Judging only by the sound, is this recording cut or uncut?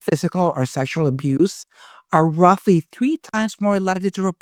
uncut